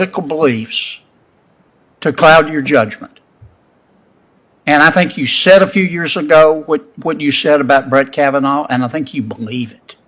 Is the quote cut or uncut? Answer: uncut